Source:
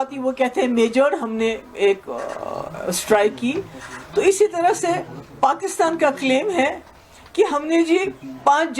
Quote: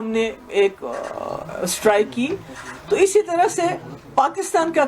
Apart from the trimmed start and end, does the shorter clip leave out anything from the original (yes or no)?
no